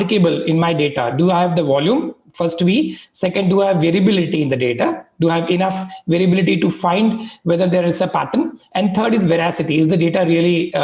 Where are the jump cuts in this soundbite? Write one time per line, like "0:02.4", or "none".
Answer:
none

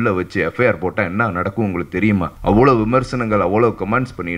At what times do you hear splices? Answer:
0:02.3

